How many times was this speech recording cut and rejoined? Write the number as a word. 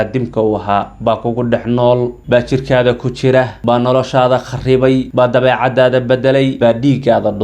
three